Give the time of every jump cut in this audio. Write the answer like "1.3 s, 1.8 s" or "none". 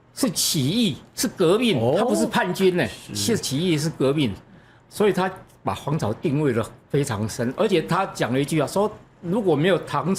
none

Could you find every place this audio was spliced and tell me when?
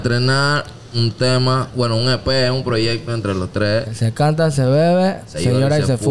3.9 s

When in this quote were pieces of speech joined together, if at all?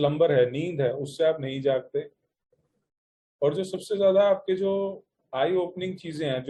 none

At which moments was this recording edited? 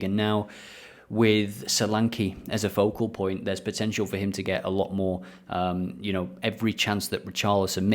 none

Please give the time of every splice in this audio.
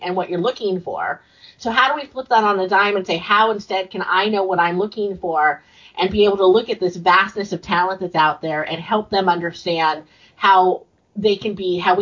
none

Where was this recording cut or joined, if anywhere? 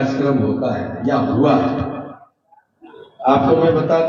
none

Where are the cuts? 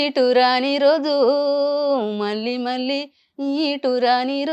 none

